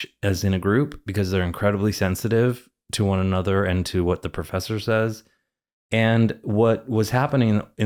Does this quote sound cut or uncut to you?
uncut